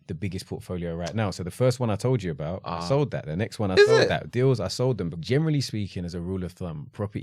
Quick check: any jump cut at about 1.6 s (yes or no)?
no